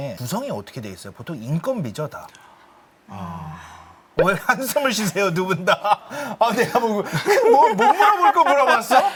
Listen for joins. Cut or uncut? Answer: uncut